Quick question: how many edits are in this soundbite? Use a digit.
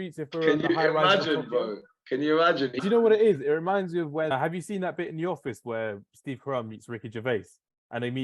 2